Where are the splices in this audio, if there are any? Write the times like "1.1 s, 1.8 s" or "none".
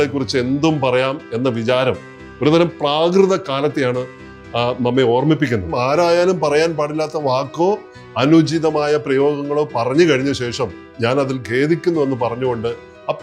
5.7 s, 10.9 s